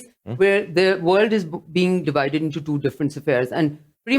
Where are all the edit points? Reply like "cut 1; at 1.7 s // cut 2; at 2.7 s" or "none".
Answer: cut 1; at 2.0 s